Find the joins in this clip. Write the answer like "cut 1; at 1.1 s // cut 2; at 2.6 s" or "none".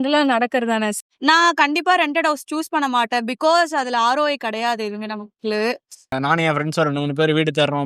cut 1; at 1.0 s // cut 2; at 6.1 s